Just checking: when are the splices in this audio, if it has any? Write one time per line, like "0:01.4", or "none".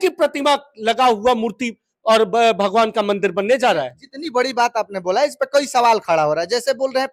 none